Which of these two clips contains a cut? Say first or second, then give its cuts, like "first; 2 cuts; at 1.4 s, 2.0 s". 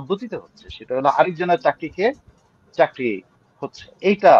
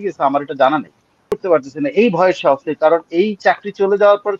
second; 1 cut; at 1.3 s